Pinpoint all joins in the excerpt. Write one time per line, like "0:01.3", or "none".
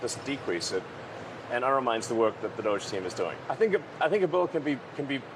0:03.4